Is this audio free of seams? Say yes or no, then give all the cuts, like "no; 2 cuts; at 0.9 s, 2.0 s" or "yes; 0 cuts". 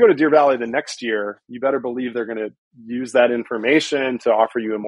yes; 0 cuts